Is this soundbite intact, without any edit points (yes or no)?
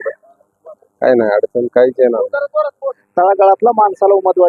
no